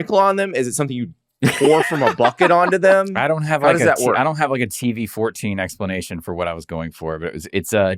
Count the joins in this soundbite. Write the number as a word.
zero